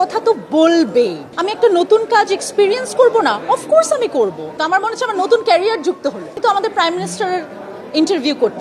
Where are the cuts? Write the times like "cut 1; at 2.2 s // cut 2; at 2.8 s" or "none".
cut 1; at 1.3 s // cut 2; at 4.5 s // cut 3; at 6.3 s